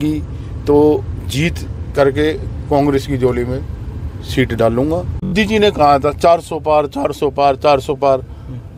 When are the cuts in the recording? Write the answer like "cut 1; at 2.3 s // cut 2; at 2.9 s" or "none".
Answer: cut 1; at 5.3 s